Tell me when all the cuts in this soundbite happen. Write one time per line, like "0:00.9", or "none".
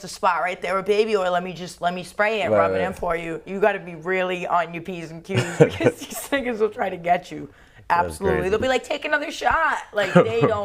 none